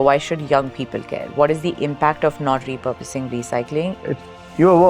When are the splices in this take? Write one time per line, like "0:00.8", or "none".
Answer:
0:04.0